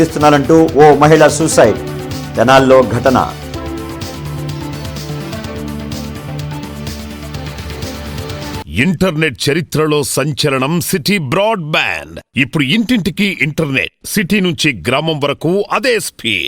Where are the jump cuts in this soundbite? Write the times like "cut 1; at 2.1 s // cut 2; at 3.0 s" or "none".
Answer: cut 1; at 8.7 s

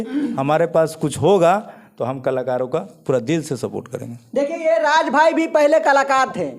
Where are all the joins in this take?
none

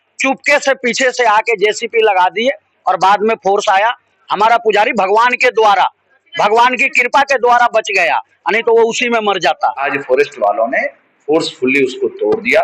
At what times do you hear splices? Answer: cut 1; at 9.9 s

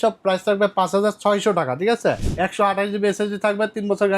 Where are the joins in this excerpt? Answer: cut 1; at 2.3 s

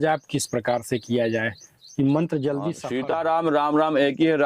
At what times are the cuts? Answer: cut 1; at 2.8 s

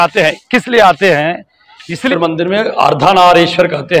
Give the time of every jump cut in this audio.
cut 1; at 2.1 s

